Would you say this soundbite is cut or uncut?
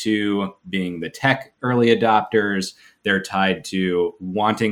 uncut